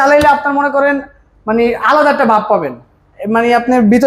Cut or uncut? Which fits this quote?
uncut